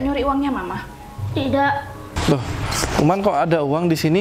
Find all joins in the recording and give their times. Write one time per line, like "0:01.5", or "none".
0:02.1